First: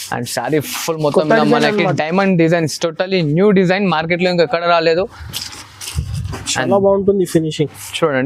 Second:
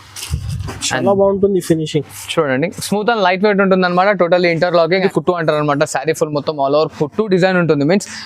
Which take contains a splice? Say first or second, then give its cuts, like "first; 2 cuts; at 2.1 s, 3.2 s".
second; 1 cut; at 5.0 s